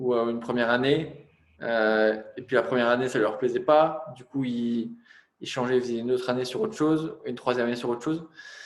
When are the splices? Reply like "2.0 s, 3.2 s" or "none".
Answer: none